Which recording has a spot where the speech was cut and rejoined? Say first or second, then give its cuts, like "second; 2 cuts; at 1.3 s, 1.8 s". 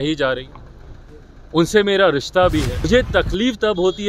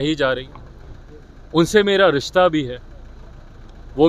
first; 1 cut; at 2.9 s